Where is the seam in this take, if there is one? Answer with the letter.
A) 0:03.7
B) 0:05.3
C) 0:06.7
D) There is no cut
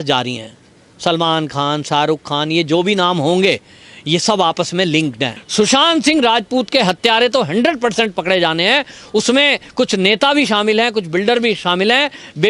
B